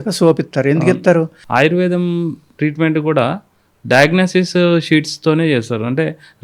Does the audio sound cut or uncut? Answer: cut